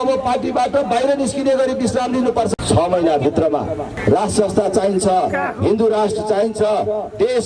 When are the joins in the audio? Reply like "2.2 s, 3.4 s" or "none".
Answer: 2.5 s, 3.9 s